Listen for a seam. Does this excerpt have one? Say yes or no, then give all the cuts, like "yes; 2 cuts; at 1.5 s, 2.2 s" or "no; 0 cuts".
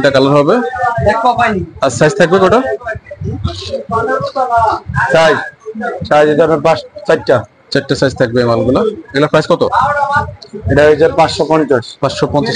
no; 0 cuts